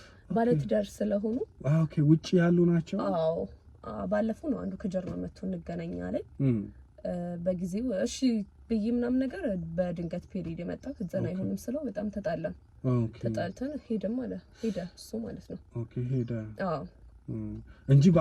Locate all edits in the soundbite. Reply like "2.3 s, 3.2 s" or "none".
none